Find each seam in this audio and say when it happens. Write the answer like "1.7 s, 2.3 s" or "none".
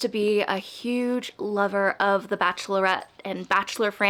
none